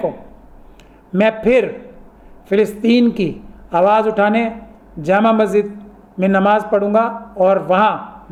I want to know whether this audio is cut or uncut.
uncut